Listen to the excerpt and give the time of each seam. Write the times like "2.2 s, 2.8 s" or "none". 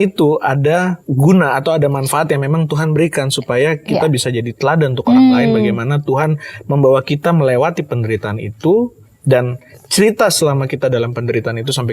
1.0 s